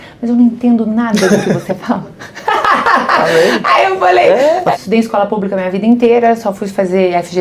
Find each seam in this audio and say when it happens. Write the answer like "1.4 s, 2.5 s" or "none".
4.7 s